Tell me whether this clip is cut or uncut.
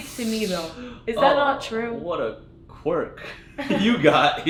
uncut